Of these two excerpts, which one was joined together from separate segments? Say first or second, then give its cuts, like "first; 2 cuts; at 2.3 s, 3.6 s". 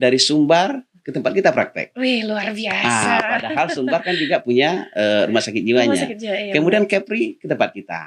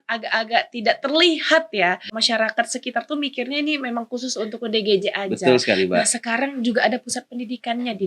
second; 1 cut; at 2.1 s